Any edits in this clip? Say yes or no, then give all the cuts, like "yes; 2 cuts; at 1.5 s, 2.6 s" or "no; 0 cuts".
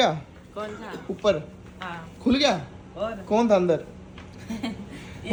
no; 0 cuts